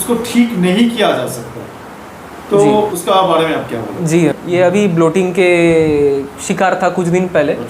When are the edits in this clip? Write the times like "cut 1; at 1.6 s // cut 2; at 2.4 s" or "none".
cut 1; at 3.0 s // cut 2; at 4.3 s